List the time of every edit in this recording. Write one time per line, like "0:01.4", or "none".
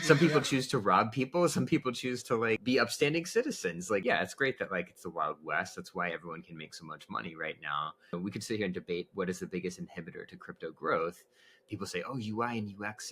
0:02.6
0:04.0
0:08.1